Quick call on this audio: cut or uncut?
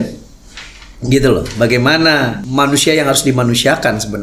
cut